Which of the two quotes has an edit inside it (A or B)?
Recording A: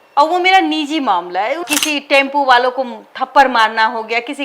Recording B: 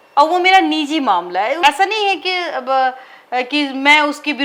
A